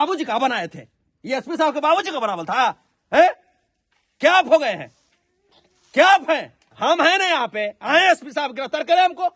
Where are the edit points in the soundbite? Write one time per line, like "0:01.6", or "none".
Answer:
0:06.7

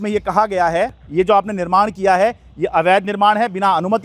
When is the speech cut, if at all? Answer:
0:01.0

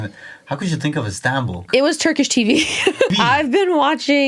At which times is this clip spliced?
0:01.6
0:03.1

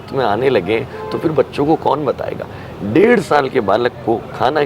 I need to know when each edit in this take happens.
none

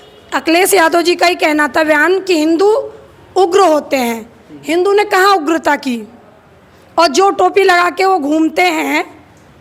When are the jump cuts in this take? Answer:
none

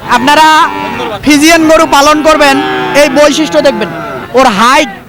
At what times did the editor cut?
none

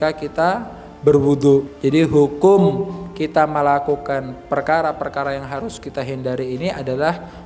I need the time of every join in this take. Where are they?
0:01.7

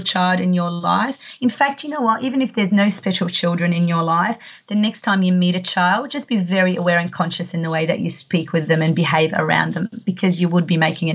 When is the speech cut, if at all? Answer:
none

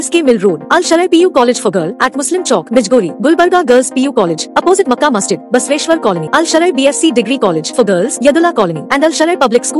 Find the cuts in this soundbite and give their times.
none

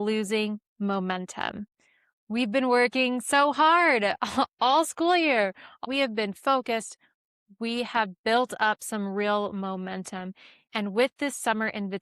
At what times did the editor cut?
0:05.8

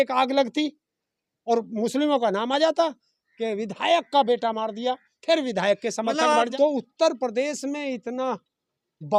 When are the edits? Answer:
0:06.5

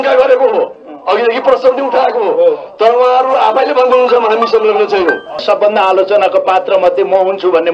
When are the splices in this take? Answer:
0:05.4

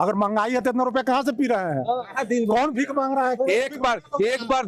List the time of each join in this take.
none

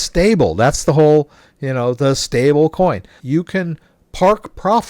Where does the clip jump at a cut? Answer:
0:03.2

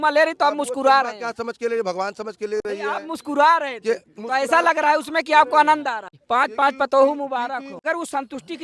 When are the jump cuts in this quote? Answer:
0:06.1
0:07.8

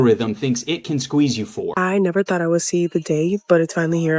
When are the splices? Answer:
0:01.7

